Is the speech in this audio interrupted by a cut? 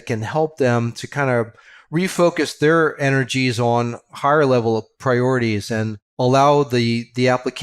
yes; 2 cuts; at 4.9 s, 6.0 s

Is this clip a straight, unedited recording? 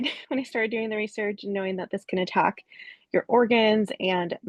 yes; 0 cuts

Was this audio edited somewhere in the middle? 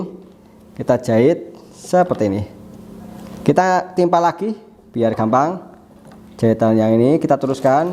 no; 0 cuts

